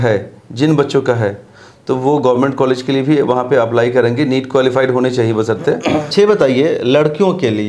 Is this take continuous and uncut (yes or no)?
no